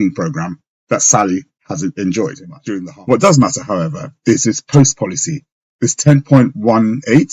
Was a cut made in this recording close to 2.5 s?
yes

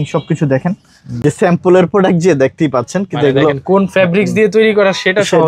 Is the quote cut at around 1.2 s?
yes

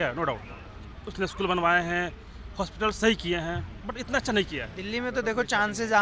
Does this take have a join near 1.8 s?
no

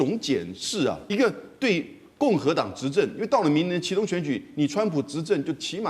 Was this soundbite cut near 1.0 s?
yes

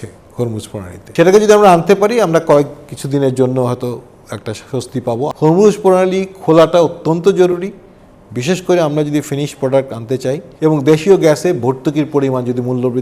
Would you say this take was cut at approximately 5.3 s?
yes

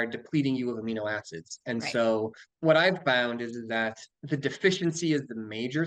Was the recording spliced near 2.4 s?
yes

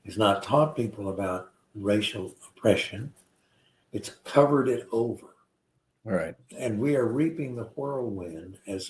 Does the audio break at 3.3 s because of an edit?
no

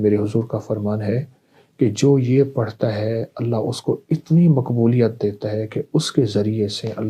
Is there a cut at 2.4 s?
no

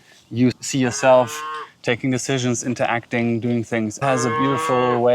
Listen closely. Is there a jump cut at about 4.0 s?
yes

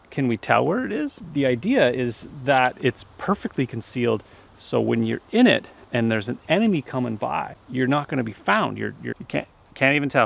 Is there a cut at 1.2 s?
yes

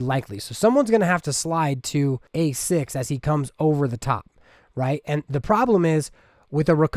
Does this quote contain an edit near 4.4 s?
no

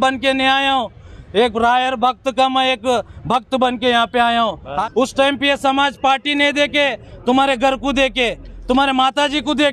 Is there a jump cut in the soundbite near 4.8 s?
yes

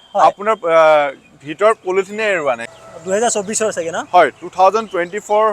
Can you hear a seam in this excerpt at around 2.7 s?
yes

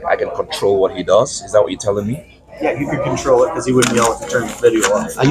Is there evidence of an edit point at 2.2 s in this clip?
no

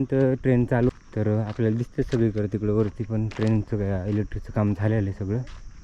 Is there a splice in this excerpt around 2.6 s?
no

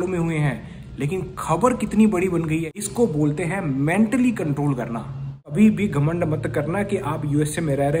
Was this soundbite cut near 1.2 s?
no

